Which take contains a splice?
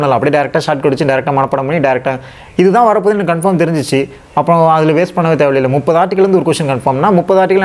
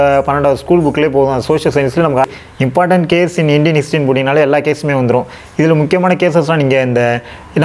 second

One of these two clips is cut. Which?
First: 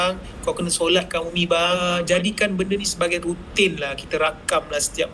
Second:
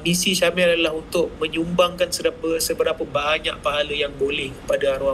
first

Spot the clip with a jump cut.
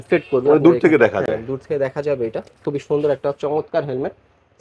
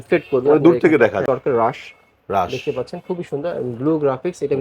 second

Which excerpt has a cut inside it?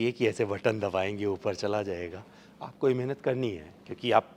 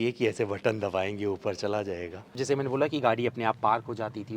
second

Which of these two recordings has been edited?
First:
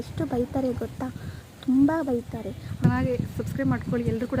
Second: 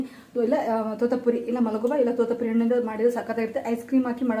first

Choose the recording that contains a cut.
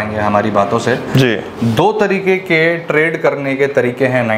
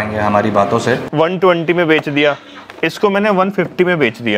second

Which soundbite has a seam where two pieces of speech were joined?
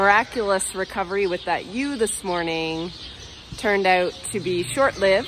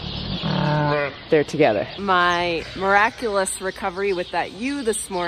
second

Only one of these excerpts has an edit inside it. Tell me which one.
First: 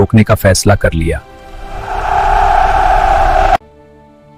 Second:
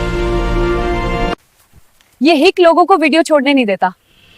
second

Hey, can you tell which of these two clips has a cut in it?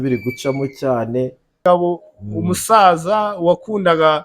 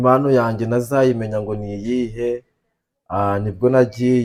first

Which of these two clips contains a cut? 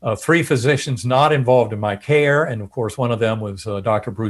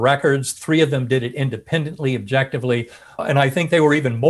second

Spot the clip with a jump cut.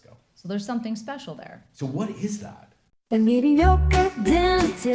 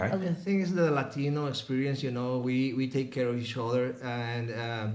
first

